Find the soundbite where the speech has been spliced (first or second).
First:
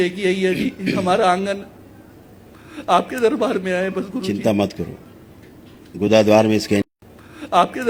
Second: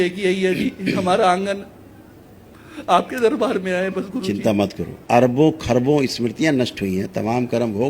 second